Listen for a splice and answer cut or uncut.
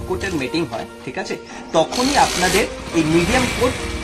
uncut